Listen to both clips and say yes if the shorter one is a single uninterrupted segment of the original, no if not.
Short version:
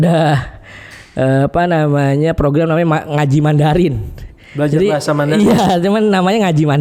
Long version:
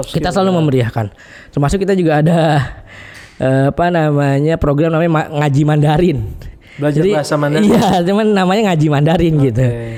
yes